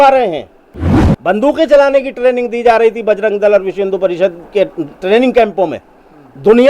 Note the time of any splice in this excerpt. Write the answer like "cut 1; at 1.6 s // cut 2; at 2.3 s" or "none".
cut 1; at 1.0 s